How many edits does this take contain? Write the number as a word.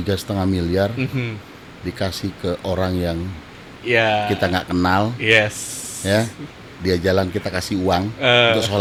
zero